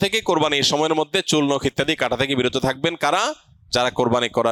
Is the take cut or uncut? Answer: uncut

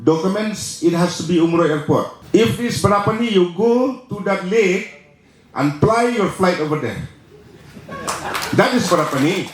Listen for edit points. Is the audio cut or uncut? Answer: cut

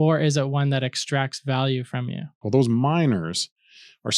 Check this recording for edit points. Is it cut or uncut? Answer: cut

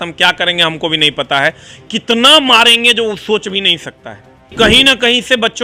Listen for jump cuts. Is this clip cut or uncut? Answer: cut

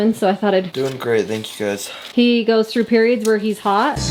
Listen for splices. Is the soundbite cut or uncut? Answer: uncut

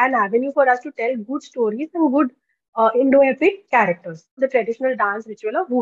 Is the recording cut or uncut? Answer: cut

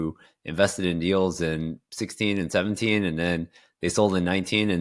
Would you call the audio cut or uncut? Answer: uncut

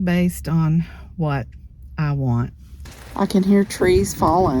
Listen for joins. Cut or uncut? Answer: cut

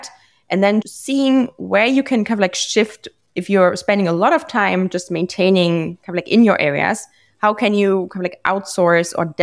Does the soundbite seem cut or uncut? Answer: cut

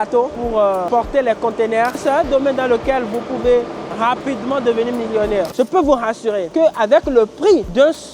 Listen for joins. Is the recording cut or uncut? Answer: cut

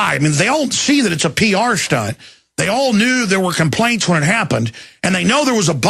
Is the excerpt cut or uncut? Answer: uncut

